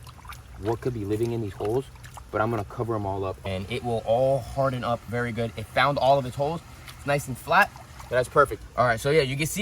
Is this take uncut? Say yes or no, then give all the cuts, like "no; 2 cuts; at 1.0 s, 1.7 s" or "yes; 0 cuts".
no; 2 cuts; at 3.4 s, 8.6 s